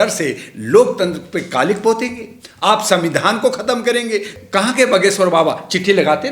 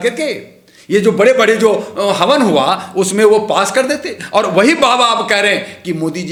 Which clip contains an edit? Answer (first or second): first